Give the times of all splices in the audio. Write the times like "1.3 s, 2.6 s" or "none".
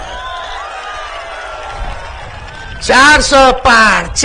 none